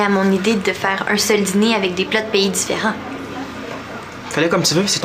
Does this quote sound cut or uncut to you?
uncut